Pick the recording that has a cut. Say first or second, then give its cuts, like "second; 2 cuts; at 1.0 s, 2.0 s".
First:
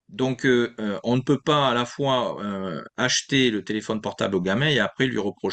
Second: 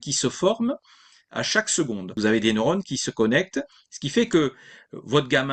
second; 1 cut; at 2.1 s